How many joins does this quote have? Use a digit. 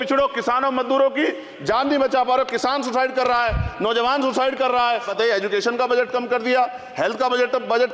1